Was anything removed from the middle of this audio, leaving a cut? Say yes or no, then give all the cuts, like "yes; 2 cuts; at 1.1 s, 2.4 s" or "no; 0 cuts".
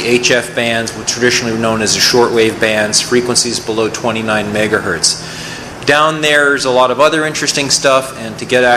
yes; 1 cut; at 4.6 s